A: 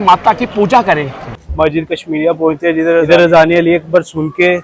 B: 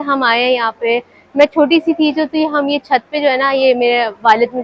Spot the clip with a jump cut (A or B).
A